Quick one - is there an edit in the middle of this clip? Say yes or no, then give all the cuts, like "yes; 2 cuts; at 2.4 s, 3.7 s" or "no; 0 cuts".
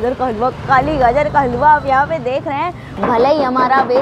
yes; 1 cut; at 2.8 s